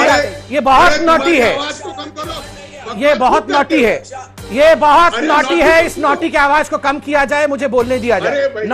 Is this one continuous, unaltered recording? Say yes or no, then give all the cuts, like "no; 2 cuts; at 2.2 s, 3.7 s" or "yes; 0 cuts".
yes; 0 cuts